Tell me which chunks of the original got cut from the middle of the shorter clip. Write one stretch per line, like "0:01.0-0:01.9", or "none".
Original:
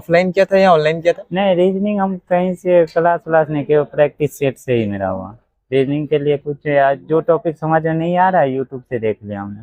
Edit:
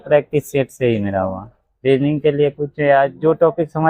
none

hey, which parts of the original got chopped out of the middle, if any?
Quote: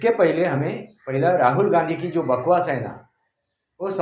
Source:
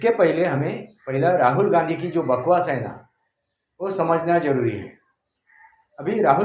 none

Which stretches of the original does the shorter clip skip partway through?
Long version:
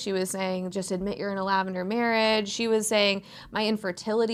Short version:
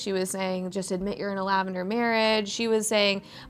none

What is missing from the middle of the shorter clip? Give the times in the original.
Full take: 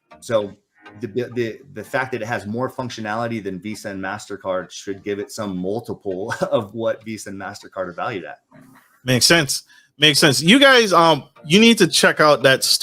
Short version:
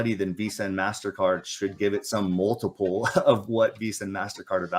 none

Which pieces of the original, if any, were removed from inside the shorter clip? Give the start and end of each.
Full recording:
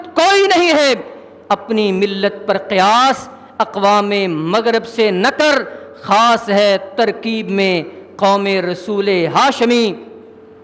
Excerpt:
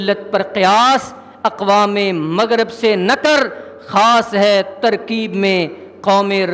none

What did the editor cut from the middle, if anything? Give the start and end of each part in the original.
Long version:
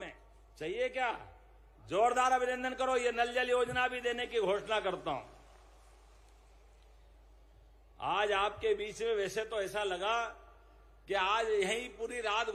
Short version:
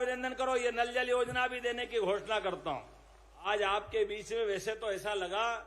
0:05.9-0:08.2

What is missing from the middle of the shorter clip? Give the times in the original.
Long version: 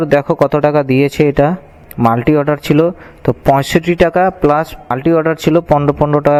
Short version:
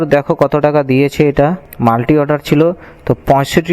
0:01.7-0:01.8

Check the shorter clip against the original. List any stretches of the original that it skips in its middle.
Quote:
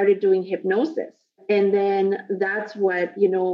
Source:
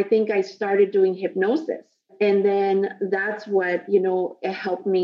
none

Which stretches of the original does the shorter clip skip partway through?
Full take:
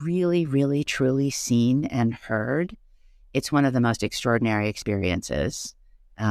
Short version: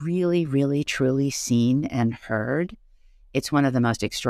none

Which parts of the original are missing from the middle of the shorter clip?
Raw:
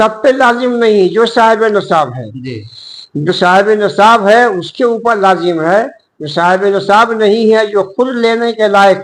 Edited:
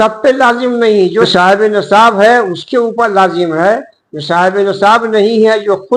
0:01.3-0:03.3

